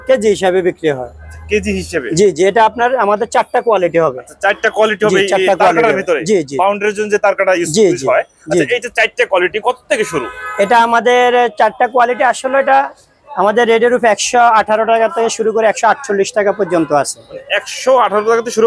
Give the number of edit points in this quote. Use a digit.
0